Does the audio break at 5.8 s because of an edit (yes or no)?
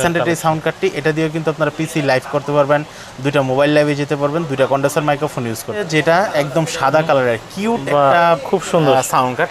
yes